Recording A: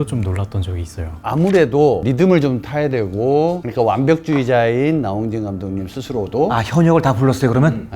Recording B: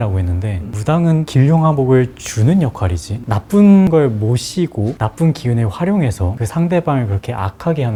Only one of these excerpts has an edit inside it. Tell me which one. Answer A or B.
A